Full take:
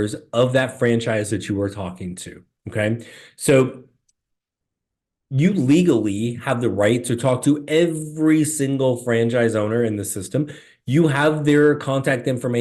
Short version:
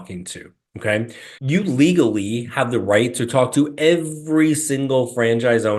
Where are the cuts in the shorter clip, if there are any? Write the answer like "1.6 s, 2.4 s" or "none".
1.3 s

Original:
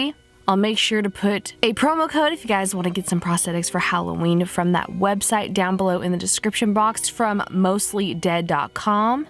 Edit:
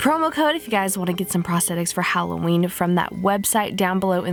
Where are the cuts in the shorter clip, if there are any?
none

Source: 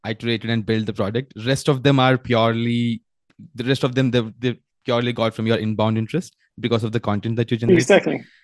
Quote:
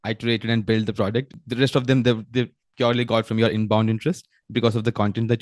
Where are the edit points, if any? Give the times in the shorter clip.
1.3 s

